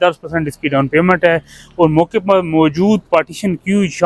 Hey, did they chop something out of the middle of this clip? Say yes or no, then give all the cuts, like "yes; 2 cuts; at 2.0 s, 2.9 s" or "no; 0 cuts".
no; 0 cuts